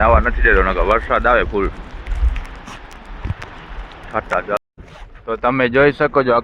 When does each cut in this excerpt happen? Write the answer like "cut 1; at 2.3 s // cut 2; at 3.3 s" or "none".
cut 1; at 4.6 s